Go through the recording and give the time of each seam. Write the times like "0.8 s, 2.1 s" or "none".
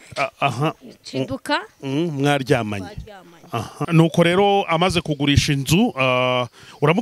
3.7 s